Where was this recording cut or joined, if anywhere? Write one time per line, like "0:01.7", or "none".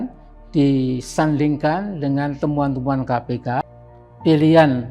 0:03.6